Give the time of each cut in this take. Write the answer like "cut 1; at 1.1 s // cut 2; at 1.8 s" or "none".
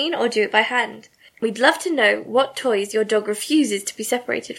cut 1; at 1.4 s